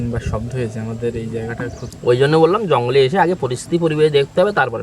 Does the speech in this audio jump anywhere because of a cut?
yes; 1 cut; at 1.9 s

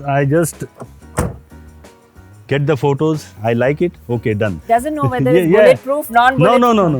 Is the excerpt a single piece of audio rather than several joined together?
no; 2 cuts; at 3.3 s, 4.5 s

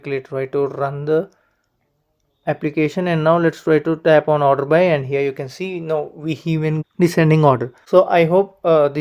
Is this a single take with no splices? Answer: yes; 0 cuts

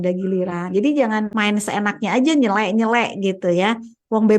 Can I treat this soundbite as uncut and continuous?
no; 1 cut; at 1.3 s

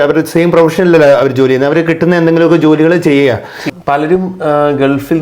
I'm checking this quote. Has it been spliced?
yes; 1 cut; at 3.6 s

